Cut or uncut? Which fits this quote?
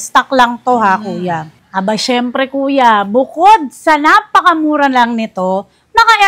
cut